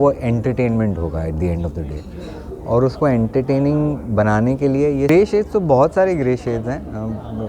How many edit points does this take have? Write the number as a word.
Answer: one